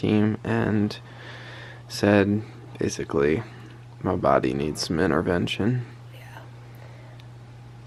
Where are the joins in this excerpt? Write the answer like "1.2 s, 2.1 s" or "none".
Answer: none

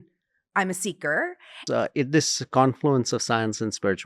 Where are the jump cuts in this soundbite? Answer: 1.6 s

